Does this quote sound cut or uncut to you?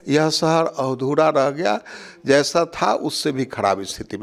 uncut